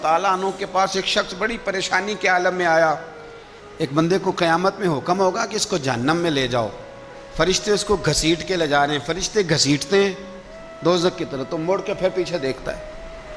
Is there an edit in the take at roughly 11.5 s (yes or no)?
no